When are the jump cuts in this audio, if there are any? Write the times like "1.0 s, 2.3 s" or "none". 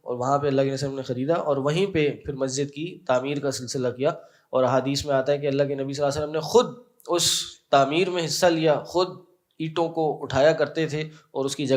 none